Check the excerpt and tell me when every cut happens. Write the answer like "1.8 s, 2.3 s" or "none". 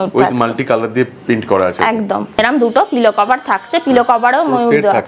2.3 s